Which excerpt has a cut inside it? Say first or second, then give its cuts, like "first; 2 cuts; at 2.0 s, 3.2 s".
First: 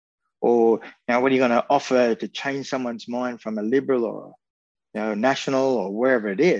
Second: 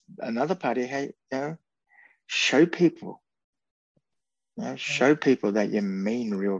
second; 1 cut; at 3.9 s